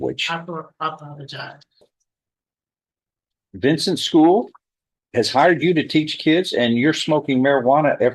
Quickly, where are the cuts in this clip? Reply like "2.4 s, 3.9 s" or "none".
1.8 s

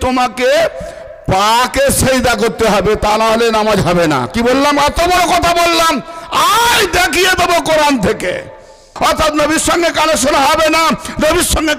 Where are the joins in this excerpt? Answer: 8.9 s

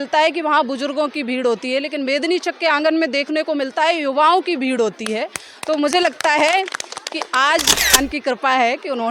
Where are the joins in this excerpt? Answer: 8.0 s

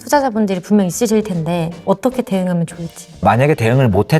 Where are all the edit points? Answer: 1.8 s, 3.2 s

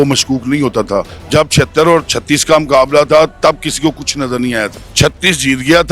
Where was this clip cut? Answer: 1.2 s, 4.8 s

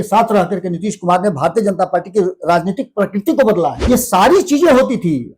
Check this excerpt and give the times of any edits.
3.8 s

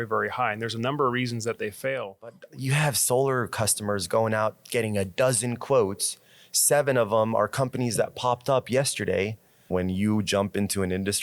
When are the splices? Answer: 2.4 s, 9.6 s

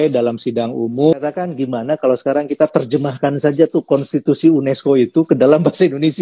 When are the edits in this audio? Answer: 1.1 s

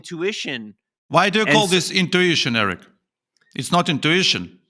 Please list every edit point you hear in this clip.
0.9 s

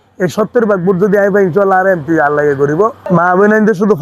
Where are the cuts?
3.0 s

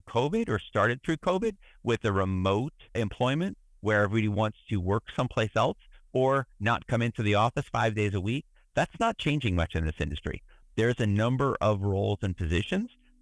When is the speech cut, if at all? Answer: 3.0 s

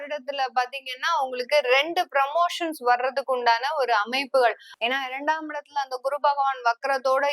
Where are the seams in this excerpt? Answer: 4.7 s

